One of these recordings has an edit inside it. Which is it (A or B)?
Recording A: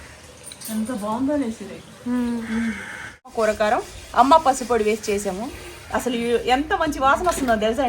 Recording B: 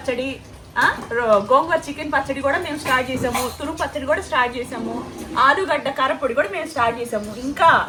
A